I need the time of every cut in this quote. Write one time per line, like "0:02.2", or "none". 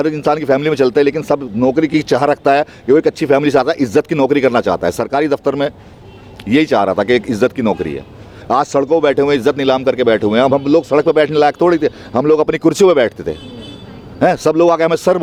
none